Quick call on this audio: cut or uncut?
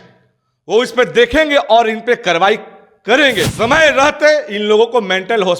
cut